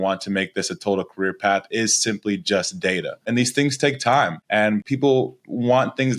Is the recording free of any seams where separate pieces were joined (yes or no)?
no